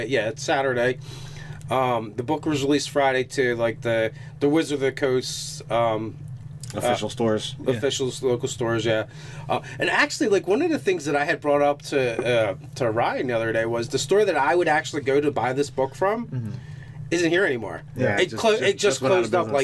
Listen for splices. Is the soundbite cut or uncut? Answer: uncut